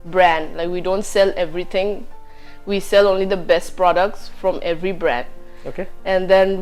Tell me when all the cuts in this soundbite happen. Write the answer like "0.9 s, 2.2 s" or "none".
none